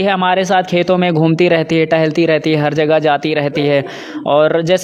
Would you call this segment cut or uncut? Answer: uncut